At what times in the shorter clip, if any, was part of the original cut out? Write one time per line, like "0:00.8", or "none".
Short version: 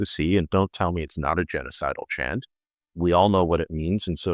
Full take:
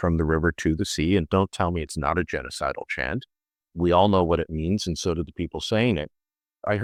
none